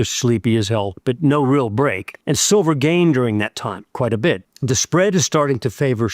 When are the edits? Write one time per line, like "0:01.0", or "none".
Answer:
0:00.9
0:02.1
0:03.8
0:04.5